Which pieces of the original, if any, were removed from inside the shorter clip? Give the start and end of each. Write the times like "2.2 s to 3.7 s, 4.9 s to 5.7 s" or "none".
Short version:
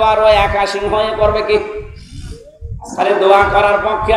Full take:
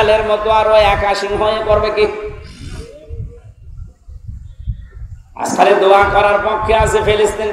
3.4 s to 5.5 s